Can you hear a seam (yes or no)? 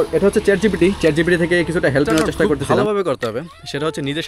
yes